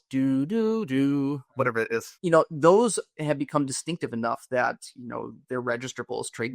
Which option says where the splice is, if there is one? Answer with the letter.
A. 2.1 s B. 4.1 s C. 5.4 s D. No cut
A